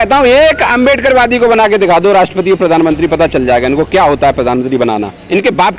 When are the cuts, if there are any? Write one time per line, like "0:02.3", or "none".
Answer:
none